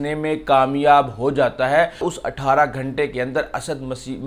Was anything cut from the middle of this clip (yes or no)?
yes